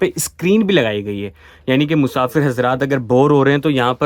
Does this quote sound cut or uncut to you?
uncut